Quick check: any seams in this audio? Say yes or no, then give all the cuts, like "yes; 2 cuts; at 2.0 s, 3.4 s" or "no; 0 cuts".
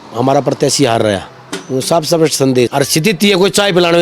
yes; 1 cut; at 2.7 s